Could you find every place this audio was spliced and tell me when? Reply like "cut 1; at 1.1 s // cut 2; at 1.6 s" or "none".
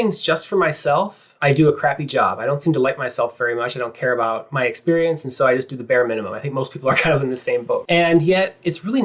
cut 1; at 1.2 s // cut 2; at 7.8 s